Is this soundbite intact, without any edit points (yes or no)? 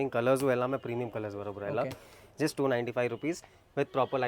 yes